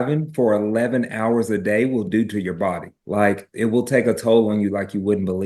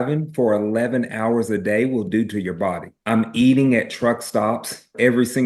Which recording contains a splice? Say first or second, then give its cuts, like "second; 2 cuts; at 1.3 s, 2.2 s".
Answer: second; 1 cut; at 2.9 s